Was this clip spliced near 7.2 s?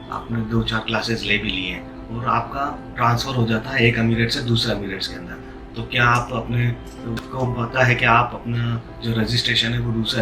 yes; 1 cut; at 7.2 s

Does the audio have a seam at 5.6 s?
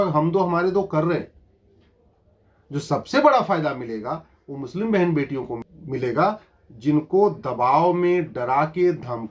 yes; 1 cut; at 5.6 s

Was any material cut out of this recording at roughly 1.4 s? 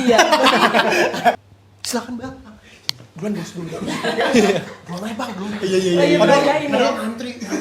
yes; 1 cut; at 1.4 s

